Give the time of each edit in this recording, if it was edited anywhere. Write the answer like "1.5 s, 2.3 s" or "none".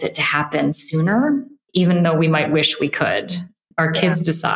3.6 s